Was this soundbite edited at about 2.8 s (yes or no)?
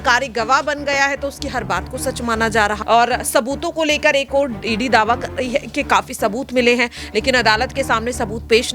yes